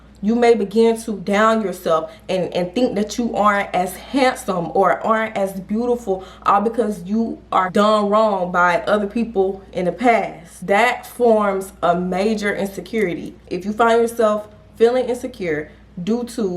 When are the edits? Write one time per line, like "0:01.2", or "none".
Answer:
0:13.3